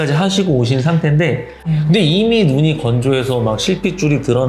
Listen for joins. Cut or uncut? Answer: cut